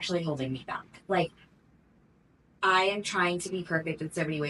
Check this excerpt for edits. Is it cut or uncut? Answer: uncut